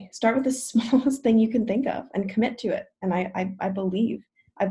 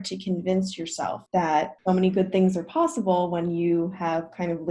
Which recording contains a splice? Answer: second; 2 cuts; at 1.2 s, 1.8 s

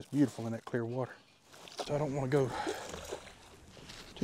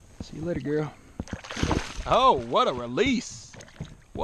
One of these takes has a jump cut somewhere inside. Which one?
first; 1 cut; at 1.8 s

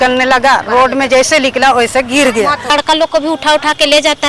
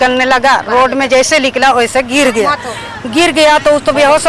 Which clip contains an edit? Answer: first; 1 cut; at 2.7 s

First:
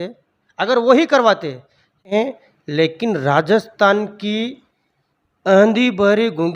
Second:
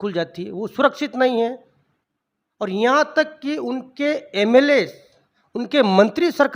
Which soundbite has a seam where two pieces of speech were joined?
first; 1 cut; at 2.1 s

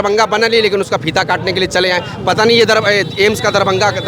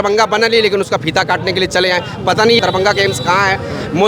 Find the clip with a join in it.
second; 1 cut; at 2.6 s

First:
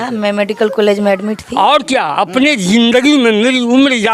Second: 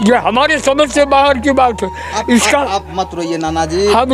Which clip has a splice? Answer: first; 1 cut; at 1.4 s

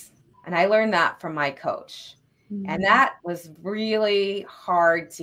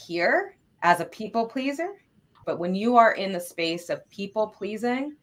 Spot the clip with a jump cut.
second; 1 cut; at 2.4 s

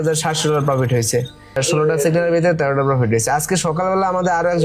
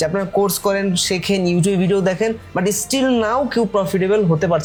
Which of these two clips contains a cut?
first; 1 cut; at 1.5 s

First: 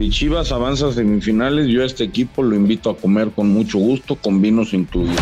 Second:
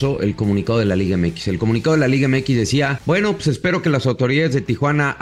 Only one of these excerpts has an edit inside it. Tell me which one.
second; 1 cut; at 3.0 s

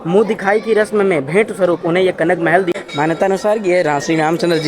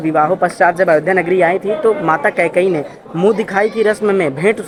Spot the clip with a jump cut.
first; 1 cut; at 2.7 s

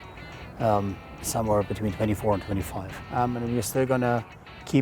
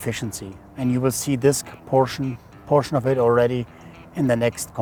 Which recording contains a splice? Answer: first; 1 cut; at 2.9 s

